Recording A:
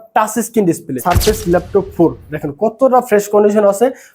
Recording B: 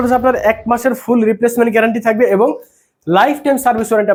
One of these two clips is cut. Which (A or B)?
A